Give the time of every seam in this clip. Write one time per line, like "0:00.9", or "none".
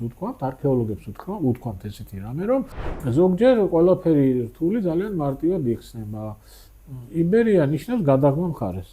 0:02.9